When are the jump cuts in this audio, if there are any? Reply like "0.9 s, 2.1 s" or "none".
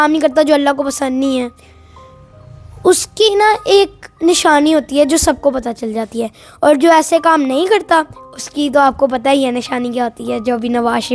none